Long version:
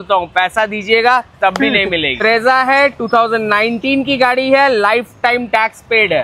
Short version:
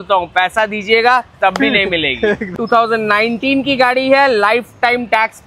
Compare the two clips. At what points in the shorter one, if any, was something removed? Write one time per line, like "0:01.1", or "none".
0:02.5